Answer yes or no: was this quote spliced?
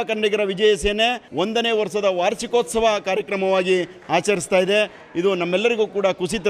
yes